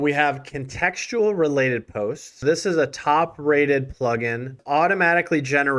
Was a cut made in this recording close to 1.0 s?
no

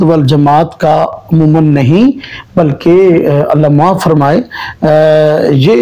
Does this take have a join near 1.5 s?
no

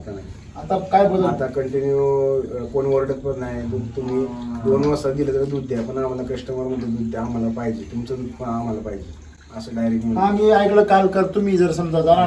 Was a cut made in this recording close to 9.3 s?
no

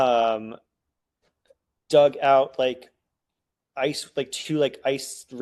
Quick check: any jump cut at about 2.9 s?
no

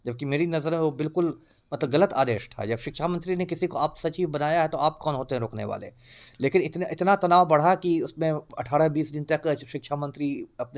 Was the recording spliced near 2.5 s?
no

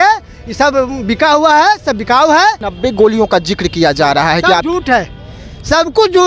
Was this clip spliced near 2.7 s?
yes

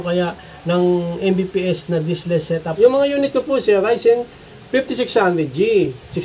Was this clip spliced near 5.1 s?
no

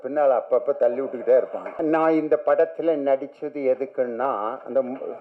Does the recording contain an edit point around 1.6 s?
yes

